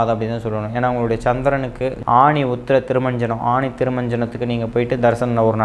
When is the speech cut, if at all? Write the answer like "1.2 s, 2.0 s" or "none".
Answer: 2.0 s